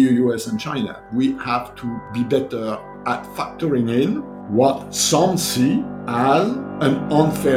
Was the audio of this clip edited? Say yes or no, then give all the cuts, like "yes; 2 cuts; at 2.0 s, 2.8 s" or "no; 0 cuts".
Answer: yes; 6 cuts; at 1.0 s, 2.0 s, 3.3 s, 4.3 s, 6.0 s, 6.7 s